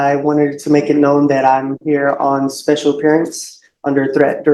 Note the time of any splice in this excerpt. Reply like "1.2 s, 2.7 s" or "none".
none